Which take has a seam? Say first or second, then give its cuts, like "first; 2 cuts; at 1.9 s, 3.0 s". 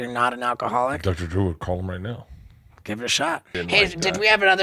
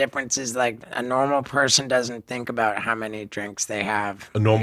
first; 1 cut; at 3.6 s